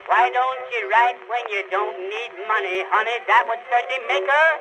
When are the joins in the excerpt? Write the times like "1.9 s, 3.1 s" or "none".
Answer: 2.7 s